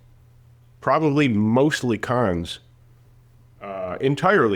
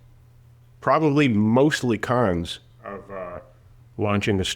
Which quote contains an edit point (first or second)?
second